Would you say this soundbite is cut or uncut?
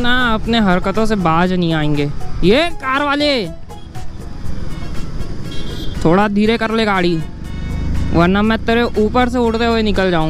uncut